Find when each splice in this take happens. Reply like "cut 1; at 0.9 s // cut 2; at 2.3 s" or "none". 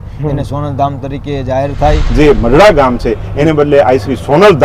cut 1; at 2.0 s

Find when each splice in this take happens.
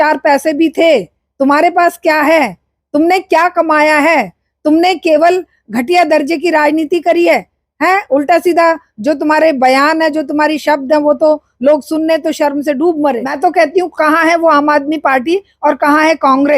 cut 1; at 13.3 s

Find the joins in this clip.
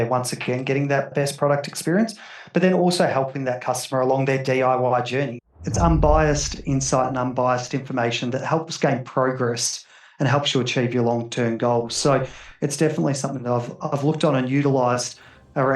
cut 1; at 1.1 s // cut 2; at 5.4 s

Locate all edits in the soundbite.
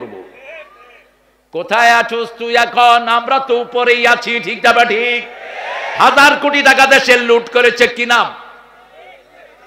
none

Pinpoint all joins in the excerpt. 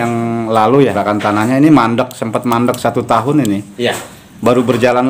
cut 1; at 0.9 s

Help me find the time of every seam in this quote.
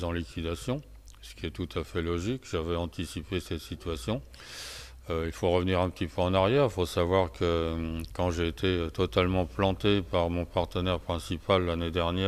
cut 1; at 8.8 s

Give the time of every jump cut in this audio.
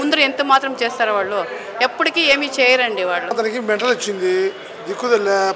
cut 1; at 3.3 s

